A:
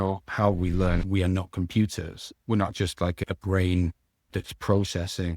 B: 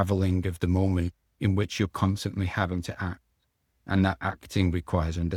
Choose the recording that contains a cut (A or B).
A